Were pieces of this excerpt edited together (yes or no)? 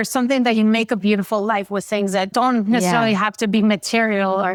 no